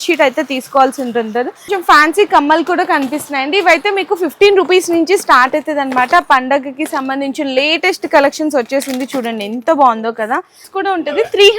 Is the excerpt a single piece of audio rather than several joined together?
no; 2 cuts; at 1.7 s, 10.6 s

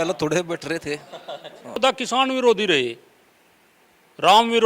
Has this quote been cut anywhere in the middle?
yes; 1 cut; at 1.8 s

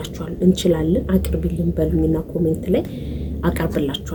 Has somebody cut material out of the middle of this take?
no; 0 cuts

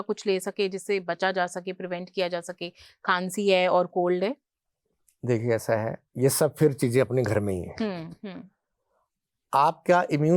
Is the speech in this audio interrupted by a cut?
no; 0 cuts

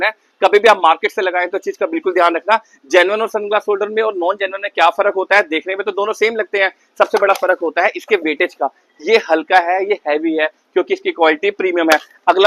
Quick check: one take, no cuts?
yes; 0 cuts

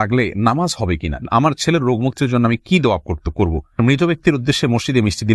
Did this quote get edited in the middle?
yes; 2 cuts; at 1.2 s, 3.8 s

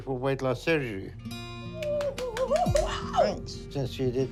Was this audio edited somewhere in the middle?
no; 0 cuts

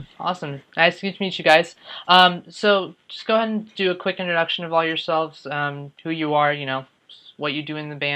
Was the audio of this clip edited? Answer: yes; 1 cut; at 6.3 s

